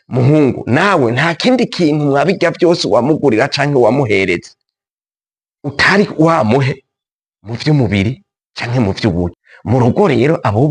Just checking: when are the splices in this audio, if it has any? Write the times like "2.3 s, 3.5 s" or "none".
9.5 s